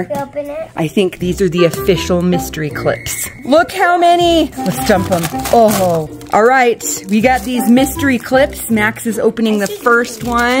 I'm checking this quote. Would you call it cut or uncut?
cut